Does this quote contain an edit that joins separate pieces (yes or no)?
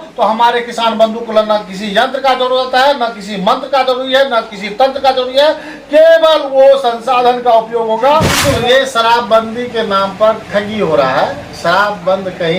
yes